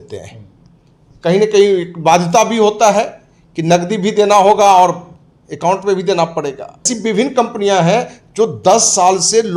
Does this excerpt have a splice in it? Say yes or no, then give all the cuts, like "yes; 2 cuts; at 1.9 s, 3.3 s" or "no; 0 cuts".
yes; 1 cut; at 6.9 s